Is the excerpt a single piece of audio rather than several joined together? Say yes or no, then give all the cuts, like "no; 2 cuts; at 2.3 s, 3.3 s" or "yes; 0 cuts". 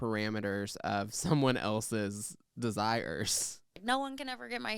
no; 1 cut; at 3.7 s